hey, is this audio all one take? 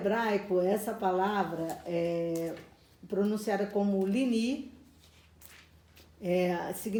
yes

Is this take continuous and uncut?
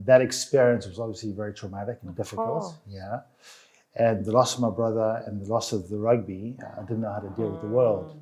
yes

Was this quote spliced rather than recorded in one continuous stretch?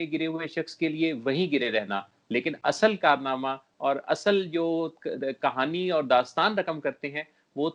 no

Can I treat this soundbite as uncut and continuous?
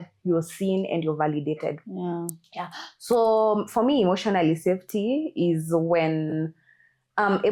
yes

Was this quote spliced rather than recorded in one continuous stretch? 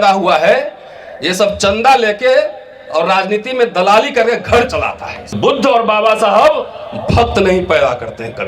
yes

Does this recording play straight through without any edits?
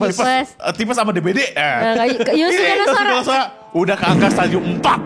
yes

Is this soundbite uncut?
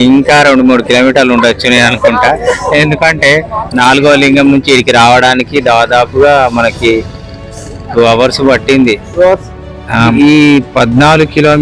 no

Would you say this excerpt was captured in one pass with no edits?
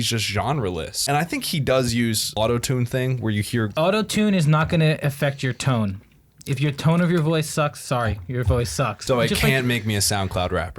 no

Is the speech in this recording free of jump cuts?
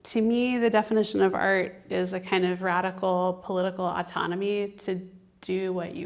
yes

